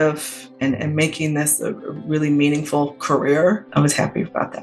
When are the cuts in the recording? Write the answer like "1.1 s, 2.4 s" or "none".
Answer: 3.7 s